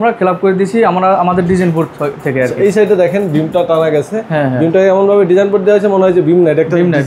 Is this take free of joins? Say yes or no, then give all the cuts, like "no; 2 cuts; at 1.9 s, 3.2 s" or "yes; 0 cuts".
yes; 0 cuts